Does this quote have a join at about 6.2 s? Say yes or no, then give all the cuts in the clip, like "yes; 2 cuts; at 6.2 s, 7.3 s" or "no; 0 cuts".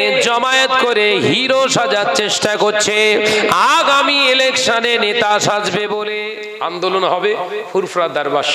yes; 1 cut; at 6.2 s